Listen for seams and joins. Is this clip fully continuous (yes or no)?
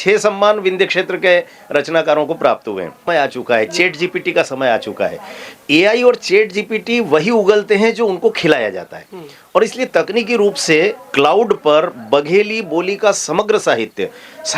no